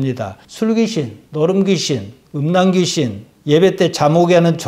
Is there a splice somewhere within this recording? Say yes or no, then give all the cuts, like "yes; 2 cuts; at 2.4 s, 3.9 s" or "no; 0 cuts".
no; 0 cuts